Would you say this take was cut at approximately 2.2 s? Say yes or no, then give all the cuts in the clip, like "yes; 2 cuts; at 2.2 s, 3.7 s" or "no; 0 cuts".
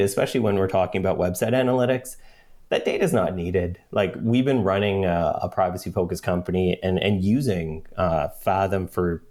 no; 0 cuts